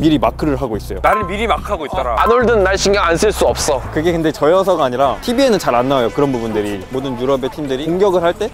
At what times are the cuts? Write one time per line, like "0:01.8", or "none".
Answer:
0:01.0
0:05.2

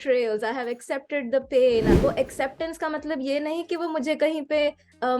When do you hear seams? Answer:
0:01.9

